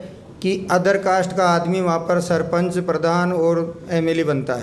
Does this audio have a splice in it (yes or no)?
no